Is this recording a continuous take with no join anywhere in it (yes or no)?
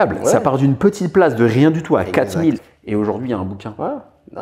no